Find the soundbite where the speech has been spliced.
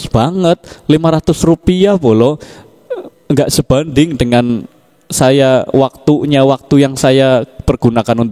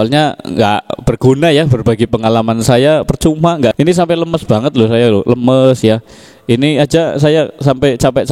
second; 1 cut; at 3.7 s

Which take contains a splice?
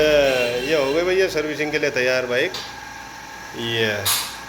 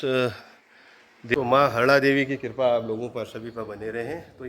second; 1 cut; at 1.3 s

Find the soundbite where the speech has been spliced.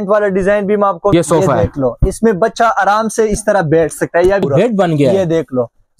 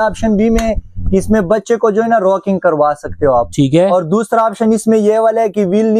first; 2 cuts; at 1.1 s, 4.4 s

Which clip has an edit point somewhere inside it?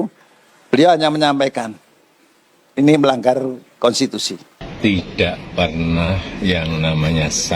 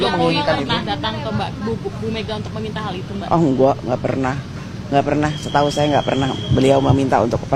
first; 1 cut; at 4.6 s

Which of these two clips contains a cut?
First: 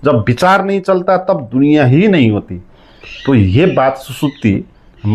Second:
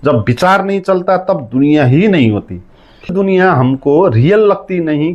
second; 1 cut; at 3.1 s

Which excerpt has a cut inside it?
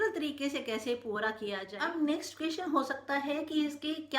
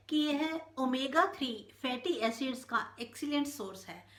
first; 1 cut; at 1.7 s

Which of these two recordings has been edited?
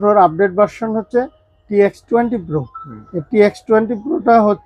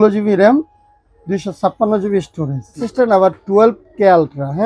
second; 1 cut; at 2.8 s

